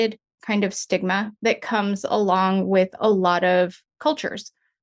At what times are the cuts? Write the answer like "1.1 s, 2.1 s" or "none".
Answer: 1.3 s

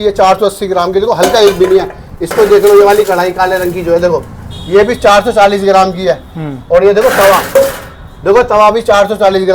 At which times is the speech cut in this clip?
none

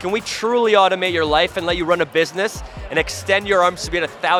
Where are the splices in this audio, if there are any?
none

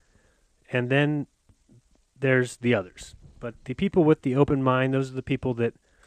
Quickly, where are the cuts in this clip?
1.2 s

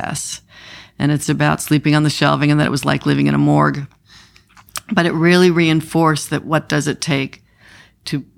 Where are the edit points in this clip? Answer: none

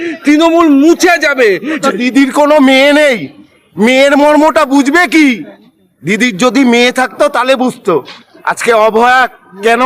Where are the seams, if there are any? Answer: 1.8 s

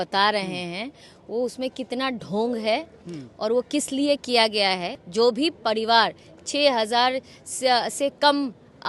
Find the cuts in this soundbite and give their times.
5.0 s

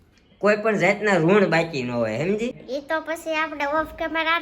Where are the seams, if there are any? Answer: 2.6 s

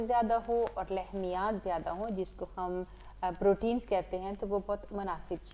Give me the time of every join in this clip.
none

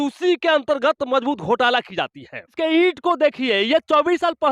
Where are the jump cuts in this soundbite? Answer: 2.5 s

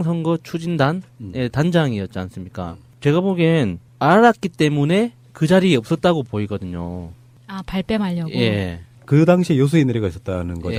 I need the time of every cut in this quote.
none

